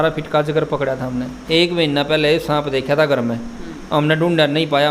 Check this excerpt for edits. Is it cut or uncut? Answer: cut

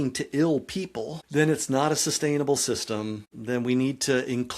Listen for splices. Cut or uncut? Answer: cut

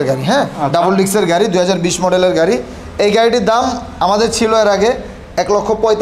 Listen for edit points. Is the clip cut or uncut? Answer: uncut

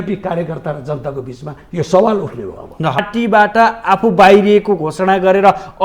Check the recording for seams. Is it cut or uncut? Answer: cut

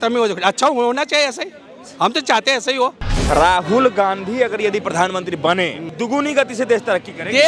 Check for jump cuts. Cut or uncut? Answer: cut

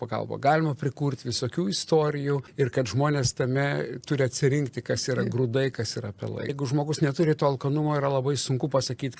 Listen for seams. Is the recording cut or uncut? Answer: cut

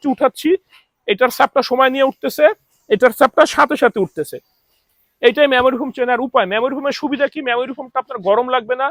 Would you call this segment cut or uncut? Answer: uncut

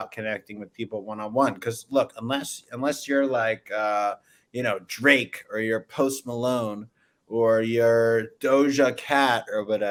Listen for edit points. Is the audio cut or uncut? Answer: uncut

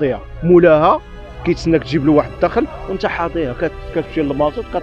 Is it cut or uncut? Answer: uncut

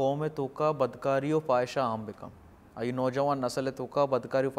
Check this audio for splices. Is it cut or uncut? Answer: uncut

